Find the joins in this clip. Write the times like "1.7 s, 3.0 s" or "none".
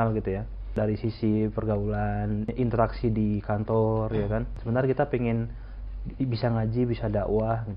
0.7 s, 2.5 s, 4.6 s